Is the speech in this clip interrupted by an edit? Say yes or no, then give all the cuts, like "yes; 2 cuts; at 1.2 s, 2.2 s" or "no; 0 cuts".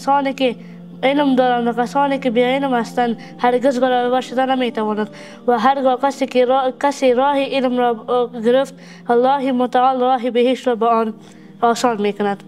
no; 0 cuts